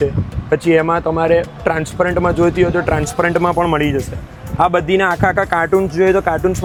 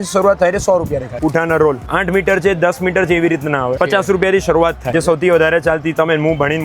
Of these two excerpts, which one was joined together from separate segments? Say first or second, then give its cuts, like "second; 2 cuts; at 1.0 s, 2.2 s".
second; 4 cuts; at 1.1 s, 1.9 s, 3.7 s, 4.9 s